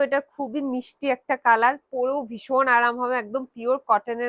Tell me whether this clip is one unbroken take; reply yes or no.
yes